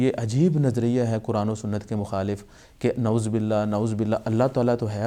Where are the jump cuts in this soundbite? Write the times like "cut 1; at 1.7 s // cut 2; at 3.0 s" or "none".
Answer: none